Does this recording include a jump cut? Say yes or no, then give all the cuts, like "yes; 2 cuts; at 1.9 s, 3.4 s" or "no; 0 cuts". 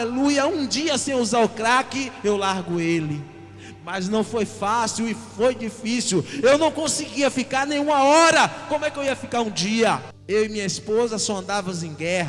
yes; 1 cut; at 10.1 s